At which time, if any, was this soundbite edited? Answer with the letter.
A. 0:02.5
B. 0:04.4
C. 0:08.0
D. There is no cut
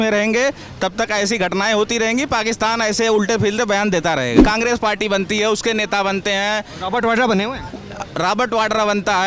B